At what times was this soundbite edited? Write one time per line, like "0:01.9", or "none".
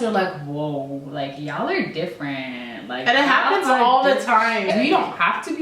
0:04.7